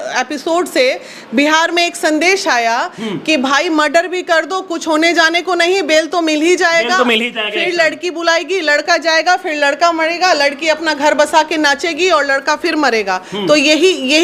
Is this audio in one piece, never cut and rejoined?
yes; 0 cuts

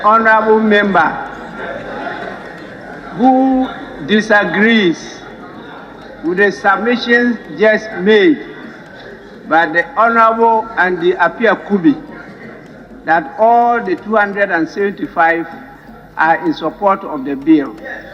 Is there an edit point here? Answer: no; 0 cuts

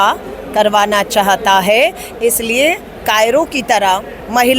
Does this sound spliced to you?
no; 0 cuts

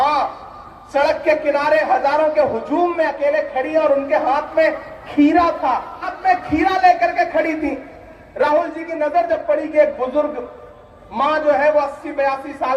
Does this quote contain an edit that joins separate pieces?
yes; 1 cut; at 6.0 s

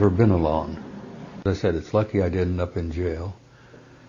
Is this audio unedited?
no; 1 cut; at 1.4 s

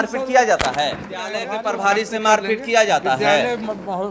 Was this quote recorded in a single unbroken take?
no; 1 cut; at 1.4 s

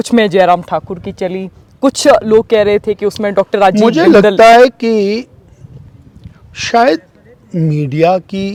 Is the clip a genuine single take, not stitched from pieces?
yes; 0 cuts

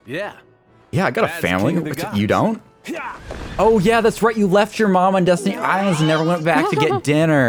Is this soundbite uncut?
yes; 0 cuts

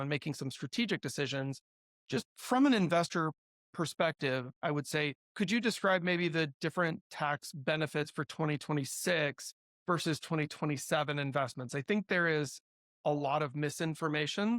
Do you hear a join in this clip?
no; 0 cuts

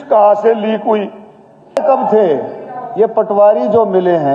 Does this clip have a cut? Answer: yes; 1 cut; at 1.8 s

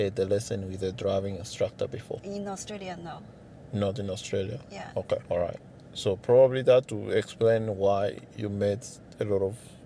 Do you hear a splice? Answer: yes; 2 cuts; at 2.2 s, 5.2 s

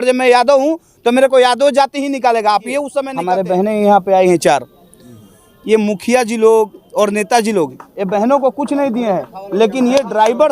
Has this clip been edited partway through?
yes; 1 cut; at 3.2 s

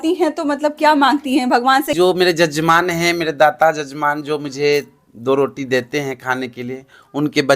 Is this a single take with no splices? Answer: no; 1 cut; at 1.9 s

